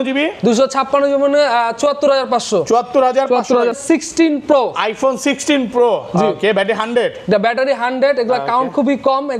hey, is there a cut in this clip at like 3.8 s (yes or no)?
yes